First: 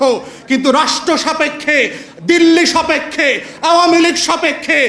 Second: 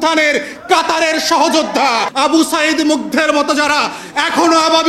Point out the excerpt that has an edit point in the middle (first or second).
second